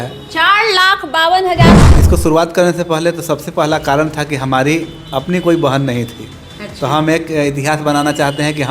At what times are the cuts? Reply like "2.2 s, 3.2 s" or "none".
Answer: 1.8 s